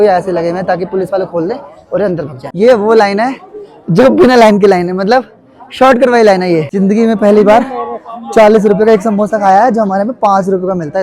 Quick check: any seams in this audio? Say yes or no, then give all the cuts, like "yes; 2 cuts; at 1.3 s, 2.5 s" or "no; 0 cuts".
yes; 2 cuts; at 2.4 s, 6.7 s